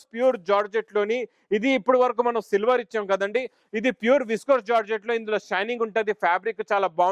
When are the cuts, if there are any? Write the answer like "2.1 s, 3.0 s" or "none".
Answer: none

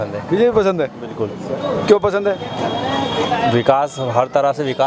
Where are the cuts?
none

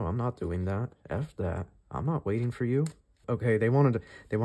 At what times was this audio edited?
3.1 s

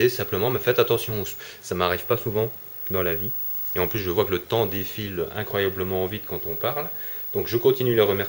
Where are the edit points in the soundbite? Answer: none

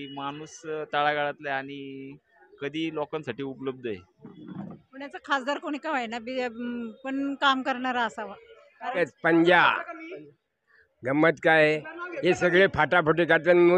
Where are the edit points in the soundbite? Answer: 4.4 s, 9.0 s

